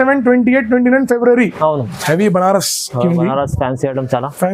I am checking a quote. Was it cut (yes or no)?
yes